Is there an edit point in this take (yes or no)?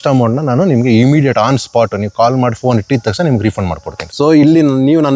yes